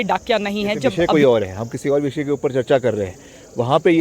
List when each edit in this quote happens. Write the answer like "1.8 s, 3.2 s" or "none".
0.9 s